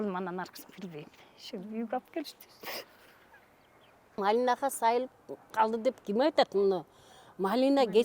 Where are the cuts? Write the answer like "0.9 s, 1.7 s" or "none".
4.2 s